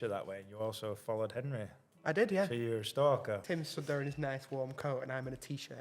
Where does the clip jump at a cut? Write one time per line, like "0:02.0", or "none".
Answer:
0:03.4